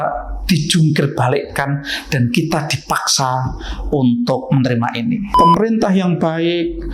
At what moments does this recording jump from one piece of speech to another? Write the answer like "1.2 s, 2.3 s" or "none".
5.3 s